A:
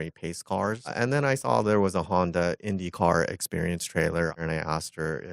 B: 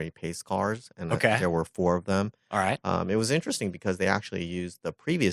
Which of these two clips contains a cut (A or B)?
A